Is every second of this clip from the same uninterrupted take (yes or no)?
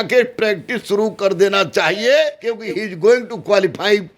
no